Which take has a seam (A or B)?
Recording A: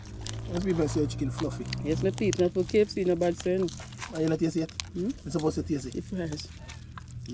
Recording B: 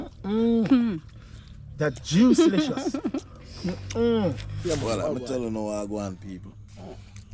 B